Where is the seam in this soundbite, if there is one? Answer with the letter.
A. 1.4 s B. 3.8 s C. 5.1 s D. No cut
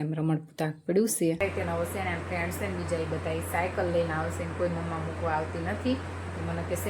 A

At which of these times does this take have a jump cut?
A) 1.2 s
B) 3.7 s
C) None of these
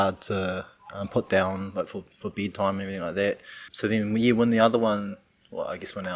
B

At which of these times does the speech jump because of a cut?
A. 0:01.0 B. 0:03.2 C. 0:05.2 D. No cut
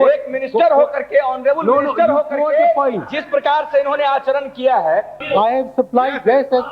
C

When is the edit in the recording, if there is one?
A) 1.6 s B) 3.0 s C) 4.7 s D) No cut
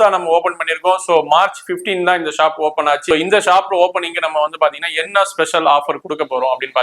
B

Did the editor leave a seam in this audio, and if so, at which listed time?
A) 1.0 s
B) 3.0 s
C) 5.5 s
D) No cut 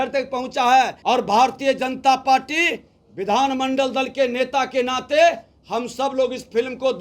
A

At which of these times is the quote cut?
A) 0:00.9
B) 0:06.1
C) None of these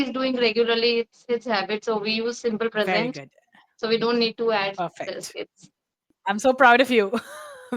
B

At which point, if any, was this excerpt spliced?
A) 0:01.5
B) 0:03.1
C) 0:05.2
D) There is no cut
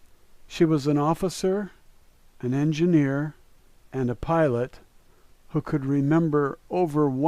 B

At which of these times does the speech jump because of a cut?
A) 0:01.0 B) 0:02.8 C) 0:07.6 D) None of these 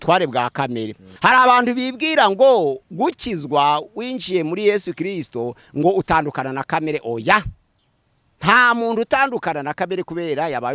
A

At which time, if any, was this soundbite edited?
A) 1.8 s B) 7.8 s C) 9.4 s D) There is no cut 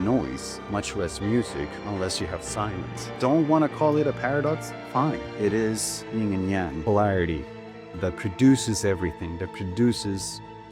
D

